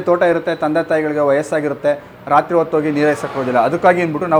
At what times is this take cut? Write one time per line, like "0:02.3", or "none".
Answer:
none